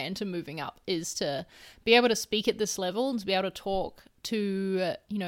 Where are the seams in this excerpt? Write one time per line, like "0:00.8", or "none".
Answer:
none

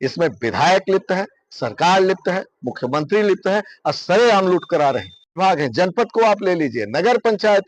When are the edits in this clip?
0:05.3

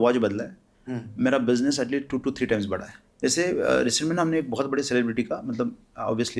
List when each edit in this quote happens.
0:03.1

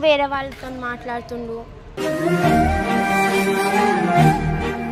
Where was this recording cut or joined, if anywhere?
none

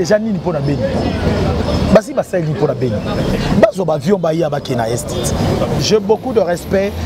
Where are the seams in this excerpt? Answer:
0:05.8

